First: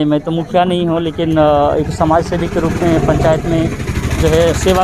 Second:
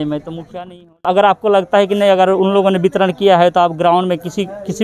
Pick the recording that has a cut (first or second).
second